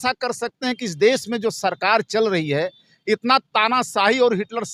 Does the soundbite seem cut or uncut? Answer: uncut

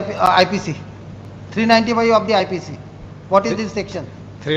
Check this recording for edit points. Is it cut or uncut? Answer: uncut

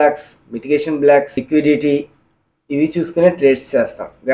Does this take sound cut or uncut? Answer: cut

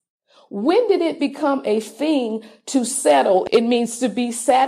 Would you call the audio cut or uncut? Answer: cut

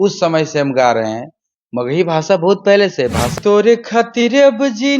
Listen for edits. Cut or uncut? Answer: cut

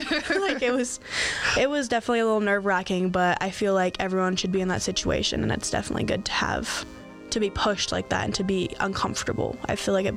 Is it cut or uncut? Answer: uncut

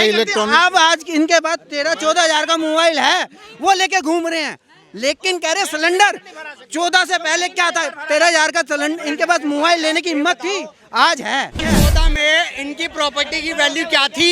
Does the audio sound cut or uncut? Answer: cut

